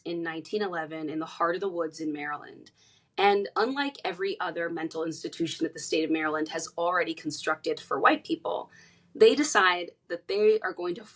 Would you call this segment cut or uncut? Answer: uncut